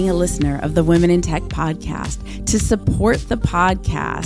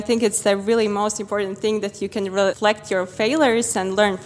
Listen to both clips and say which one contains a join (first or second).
second